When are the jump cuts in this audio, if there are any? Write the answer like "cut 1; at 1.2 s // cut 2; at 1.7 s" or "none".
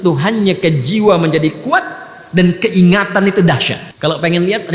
cut 1; at 3.8 s